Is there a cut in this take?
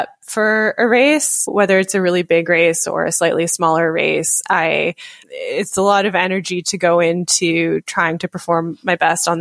no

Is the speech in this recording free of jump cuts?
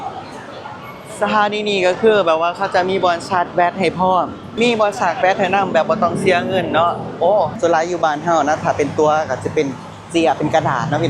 no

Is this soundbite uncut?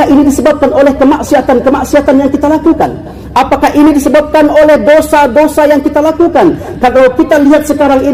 yes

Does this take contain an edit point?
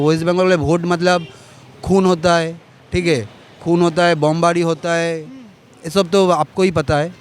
no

